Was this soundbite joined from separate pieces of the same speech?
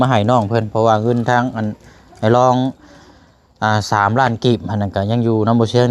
no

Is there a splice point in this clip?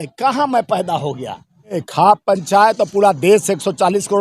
yes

